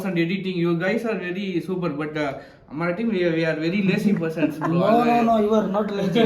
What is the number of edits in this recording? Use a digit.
0